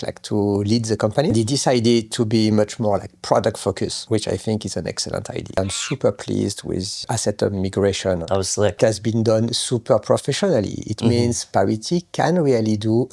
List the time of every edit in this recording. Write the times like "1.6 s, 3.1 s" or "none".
1.3 s, 4.0 s, 5.6 s, 7.0 s, 8.2 s